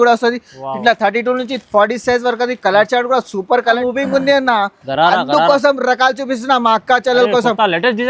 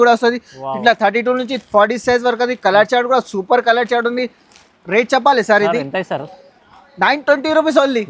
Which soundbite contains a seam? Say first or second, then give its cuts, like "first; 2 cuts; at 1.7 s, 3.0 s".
first; 1 cut; at 3.8 s